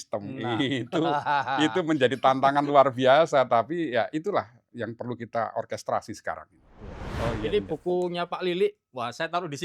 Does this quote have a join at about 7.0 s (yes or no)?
yes